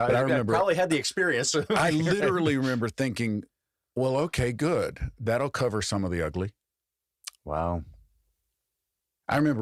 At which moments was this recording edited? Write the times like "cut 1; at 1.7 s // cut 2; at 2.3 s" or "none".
none